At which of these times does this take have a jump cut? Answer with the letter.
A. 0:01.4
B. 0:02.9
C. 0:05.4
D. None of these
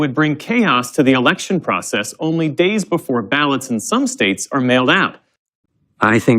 C